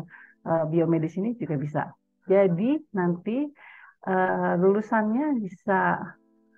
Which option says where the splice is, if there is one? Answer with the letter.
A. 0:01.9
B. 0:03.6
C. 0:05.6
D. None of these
D